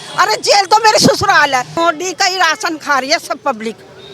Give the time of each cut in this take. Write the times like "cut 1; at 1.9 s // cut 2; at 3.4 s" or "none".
cut 1; at 1.7 s

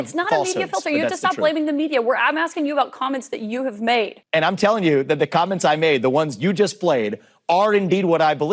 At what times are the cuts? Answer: cut 1; at 4.2 s

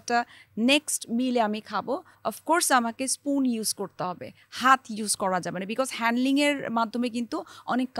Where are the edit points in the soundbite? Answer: none

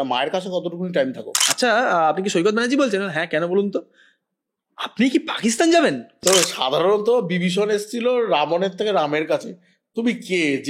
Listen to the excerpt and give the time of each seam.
cut 1; at 1.4 s // cut 2; at 6.2 s

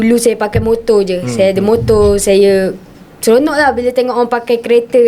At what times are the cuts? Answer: none

